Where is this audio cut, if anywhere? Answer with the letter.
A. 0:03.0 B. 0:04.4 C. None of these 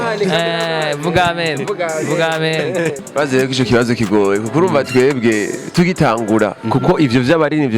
A